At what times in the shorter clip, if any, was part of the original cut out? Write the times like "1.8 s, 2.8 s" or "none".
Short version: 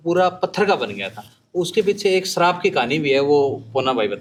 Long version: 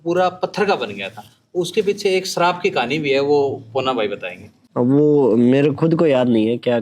none